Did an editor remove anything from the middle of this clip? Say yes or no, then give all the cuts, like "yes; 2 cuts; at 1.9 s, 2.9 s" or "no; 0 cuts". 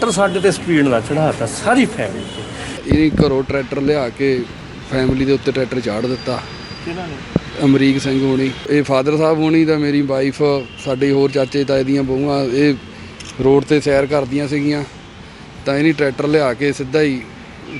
yes; 2 cuts; at 2.8 s, 8.6 s